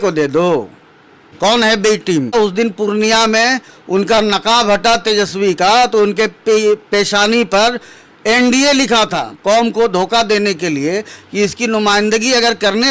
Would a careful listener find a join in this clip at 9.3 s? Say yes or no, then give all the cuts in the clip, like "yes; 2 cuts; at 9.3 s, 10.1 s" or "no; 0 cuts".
yes; 2 cuts; at 2.3 s, 9.3 s